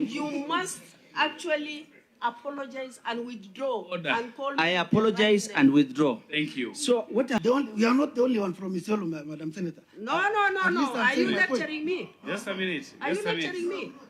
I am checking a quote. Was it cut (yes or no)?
yes